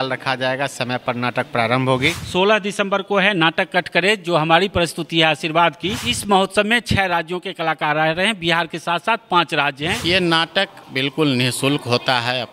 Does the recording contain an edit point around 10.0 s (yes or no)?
yes